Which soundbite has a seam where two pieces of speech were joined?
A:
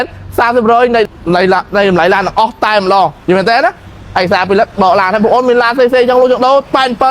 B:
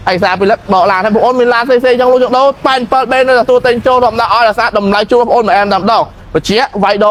A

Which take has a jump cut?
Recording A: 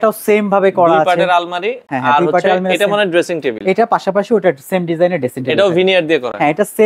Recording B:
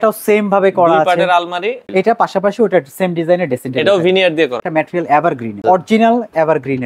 B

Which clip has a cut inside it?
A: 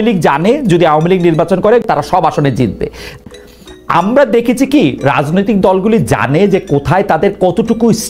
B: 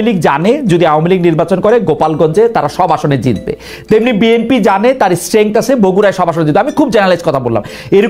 A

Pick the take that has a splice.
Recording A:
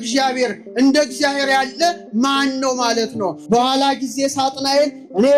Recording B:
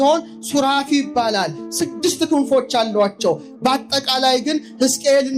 A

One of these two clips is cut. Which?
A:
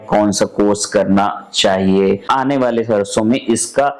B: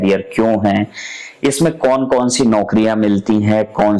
A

